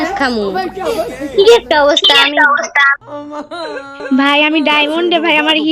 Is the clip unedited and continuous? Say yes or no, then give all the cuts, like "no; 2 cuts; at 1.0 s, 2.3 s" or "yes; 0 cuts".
yes; 0 cuts